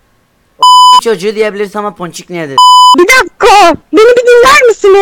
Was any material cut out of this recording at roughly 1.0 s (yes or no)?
no